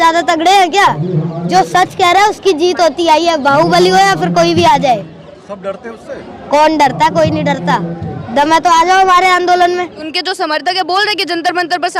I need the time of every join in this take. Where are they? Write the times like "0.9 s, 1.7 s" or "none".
10.2 s